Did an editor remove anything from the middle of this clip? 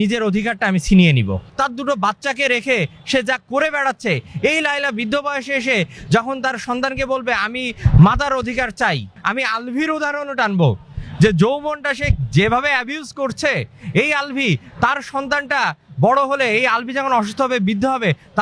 yes; 2 cuts; at 1.4 s, 9.2 s

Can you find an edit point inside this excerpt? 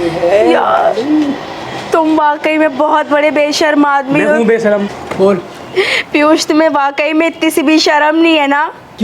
yes; 1 cut; at 5.0 s

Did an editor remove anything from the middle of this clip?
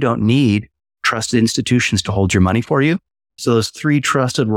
yes; 1 cut; at 3.3 s

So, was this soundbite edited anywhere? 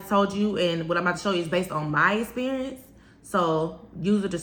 no; 0 cuts

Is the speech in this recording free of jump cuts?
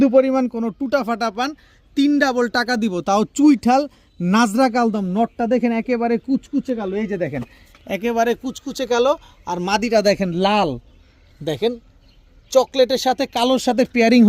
yes; 0 cuts

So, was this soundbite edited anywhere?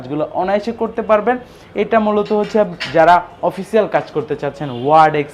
no; 0 cuts

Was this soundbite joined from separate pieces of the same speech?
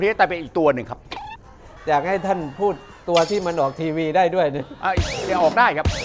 yes; 1 cut; at 1.6 s

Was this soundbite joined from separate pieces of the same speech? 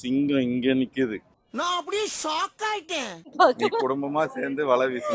yes; 1 cut; at 3.3 s

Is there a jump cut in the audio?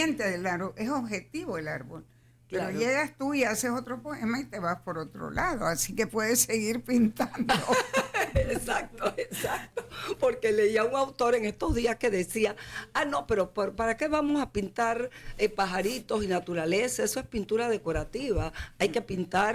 no; 0 cuts

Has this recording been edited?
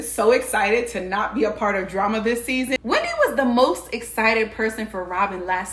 yes; 1 cut; at 2.8 s

